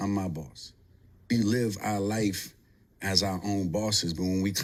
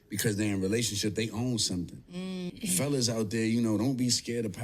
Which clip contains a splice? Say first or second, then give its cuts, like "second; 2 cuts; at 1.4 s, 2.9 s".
second; 1 cut; at 2.5 s